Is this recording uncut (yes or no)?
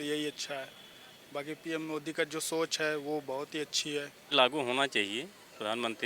no